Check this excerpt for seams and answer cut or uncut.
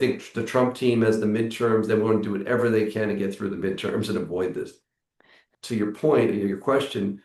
cut